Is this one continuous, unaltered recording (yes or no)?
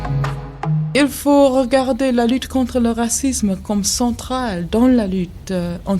no